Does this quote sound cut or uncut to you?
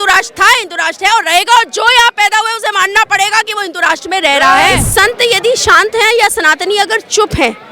cut